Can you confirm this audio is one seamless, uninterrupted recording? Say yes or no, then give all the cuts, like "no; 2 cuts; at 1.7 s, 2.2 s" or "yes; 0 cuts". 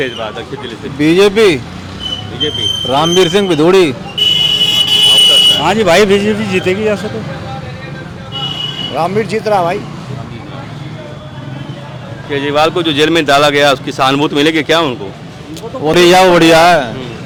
yes; 0 cuts